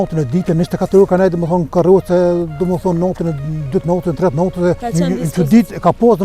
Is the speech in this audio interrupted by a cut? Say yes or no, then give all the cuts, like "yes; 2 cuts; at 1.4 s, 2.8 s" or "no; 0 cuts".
yes; 1 cut; at 4.8 s